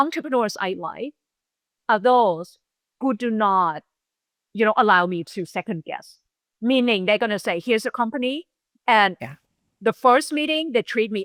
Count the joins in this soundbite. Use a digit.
0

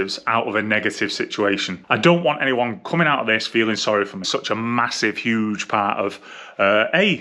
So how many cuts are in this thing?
2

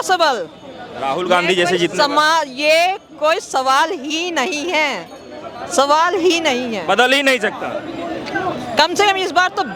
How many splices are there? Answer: 0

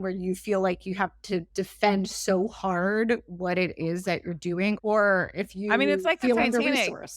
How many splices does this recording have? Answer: 2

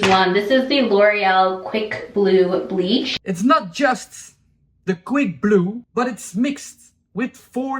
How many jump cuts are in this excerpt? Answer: 2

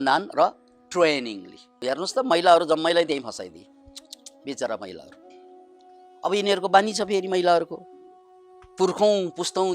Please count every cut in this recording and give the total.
1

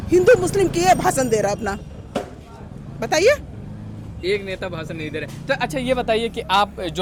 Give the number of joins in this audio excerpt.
0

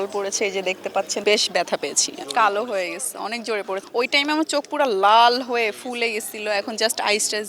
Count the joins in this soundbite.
2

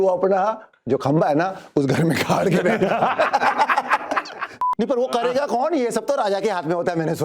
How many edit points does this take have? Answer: 1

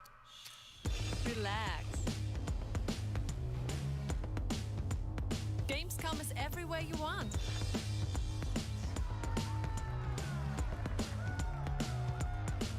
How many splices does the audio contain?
1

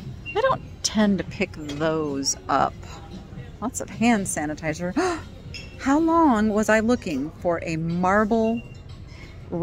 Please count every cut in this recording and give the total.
0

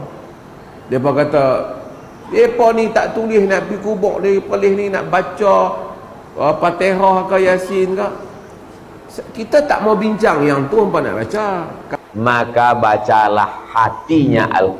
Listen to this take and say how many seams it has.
1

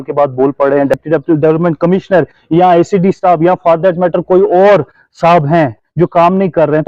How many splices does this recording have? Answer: 1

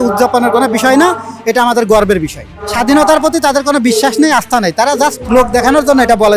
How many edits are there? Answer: 1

